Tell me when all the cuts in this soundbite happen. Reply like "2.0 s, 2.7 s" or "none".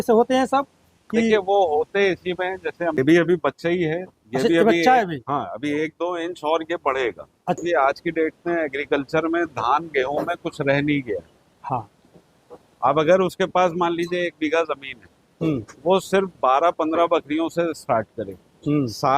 3.0 s, 7.6 s

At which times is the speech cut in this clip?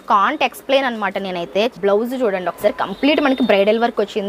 1.7 s

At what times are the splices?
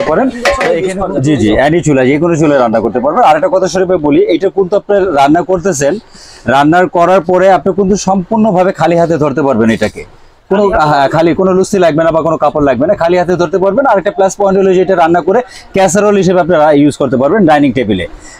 0.9 s

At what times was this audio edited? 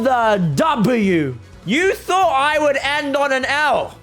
1.4 s

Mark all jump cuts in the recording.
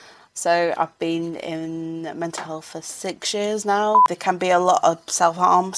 4.0 s

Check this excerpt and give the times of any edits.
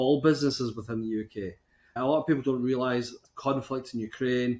2.0 s, 3.2 s

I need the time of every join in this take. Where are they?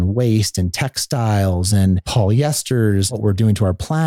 2.1 s, 3.1 s

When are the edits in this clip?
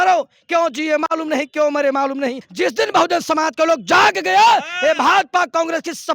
2.4 s

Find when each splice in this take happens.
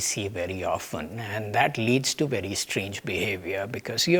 none

